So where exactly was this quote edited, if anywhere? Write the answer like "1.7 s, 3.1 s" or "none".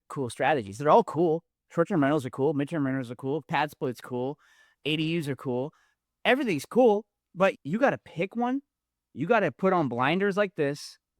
7.6 s